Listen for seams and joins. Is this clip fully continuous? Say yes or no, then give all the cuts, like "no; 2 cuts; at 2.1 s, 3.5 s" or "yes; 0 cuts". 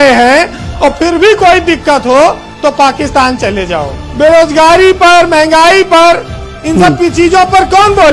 no; 1 cut; at 4.0 s